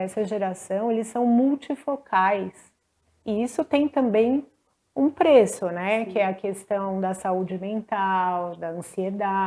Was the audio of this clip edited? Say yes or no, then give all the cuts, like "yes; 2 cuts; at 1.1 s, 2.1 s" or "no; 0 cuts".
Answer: no; 0 cuts